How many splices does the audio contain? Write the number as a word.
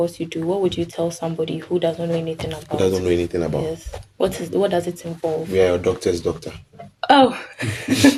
zero